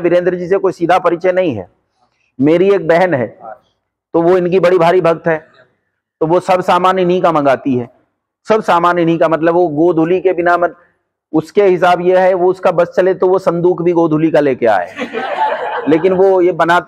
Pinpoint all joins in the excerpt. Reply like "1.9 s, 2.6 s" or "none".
none